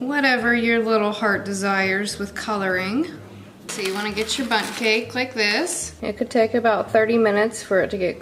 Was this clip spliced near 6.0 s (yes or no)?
yes